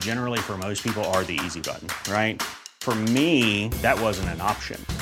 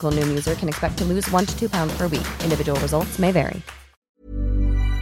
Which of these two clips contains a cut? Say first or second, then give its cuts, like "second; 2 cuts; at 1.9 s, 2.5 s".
second; 1 cut; at 4.1 s